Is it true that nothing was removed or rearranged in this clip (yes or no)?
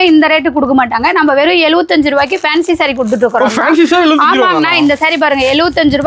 yes